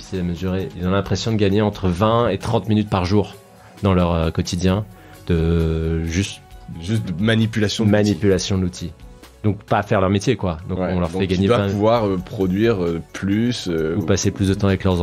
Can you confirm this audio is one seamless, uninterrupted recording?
yes; 0 cuts

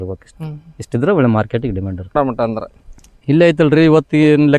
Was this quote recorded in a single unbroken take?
yes; 0 cuts

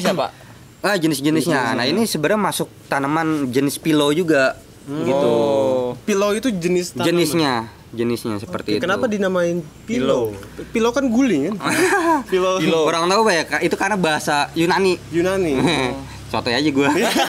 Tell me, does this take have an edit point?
no; 0 cuts

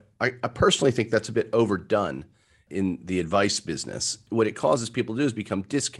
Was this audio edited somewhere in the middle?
yes; 2 cuts; at 2.6 s, 4.2 s

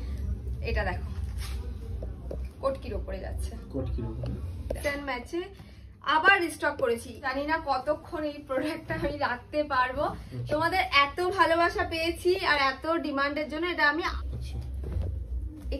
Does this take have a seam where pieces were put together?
yes; 3 cuts; at 4.8 s, 7.3 s, 14.1 s

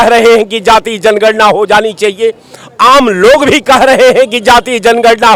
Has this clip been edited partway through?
no; 0 cuts

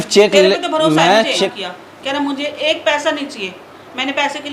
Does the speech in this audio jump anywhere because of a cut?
yes; 1 cut; at 1.3 s

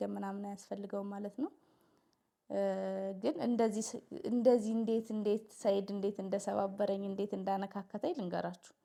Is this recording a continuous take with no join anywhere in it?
yes; 0 cuts

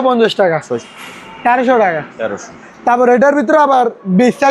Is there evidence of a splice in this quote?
yes; 1 cut; at 0.9 s

